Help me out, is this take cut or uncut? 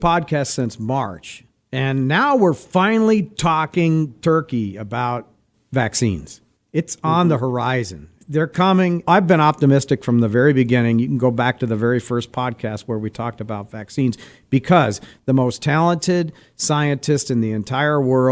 uncut